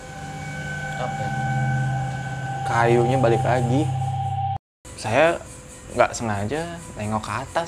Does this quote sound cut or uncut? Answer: cut